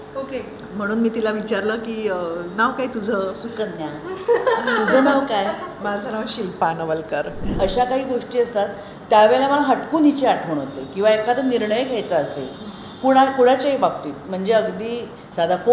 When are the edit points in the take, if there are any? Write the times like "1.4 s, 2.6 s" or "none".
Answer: 7.5 s